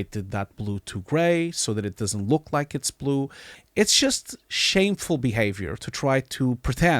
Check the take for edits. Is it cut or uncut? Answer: cut